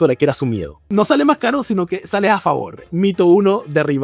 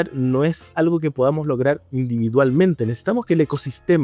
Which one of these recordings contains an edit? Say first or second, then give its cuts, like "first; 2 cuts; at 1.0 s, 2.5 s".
first; 2 cuts; at 0.8 s, 2.8 s